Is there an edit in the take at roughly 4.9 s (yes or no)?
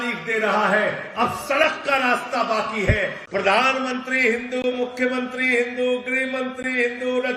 no